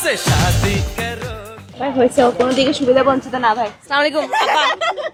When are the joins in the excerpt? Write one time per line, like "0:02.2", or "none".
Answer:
none